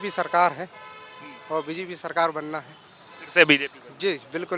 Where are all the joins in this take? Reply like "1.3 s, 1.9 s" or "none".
none